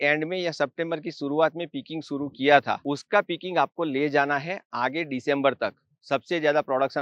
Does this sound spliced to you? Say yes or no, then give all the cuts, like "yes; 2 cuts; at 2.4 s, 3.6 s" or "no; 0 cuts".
no; 0 cuts